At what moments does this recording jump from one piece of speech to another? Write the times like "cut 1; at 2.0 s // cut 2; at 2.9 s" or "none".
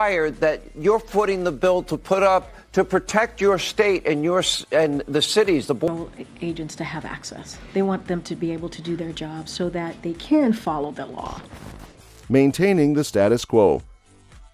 none